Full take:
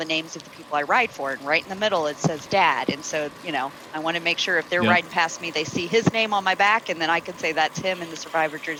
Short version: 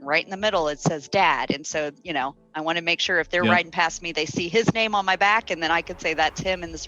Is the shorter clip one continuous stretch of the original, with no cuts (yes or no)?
yes